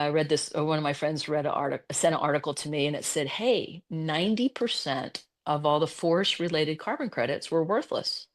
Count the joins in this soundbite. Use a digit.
0